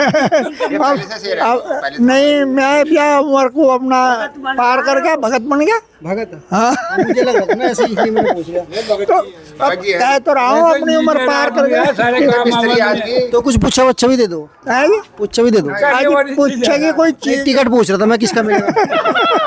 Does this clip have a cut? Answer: no; 0 cuts

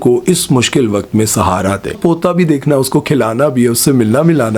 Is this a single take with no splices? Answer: no; 1 cut; at 2.0 s

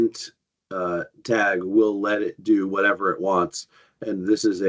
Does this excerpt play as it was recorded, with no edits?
yes; 0 cuts

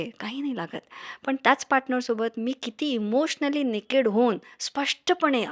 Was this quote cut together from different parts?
no; 0 cuts

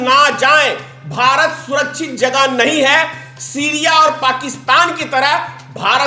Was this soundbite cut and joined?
no; 0 cuts

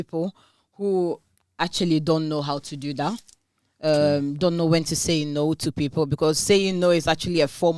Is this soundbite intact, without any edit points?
yes; 0 cuts

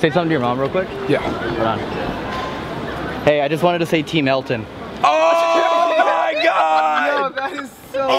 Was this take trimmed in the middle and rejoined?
no; 0 cuts

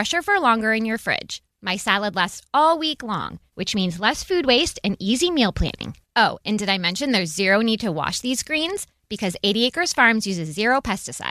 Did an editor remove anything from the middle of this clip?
no; 0 cuts

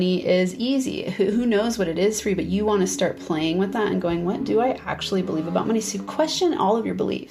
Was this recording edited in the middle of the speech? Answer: no; 0 cuts

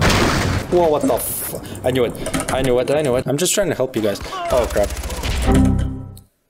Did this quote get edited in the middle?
yes; 1 cut; at 3.2 s

